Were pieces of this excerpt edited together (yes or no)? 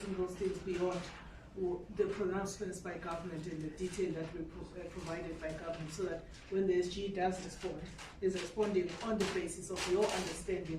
yes